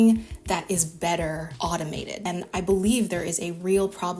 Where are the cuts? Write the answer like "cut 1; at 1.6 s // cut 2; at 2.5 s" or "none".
cut 1; at 2.1 s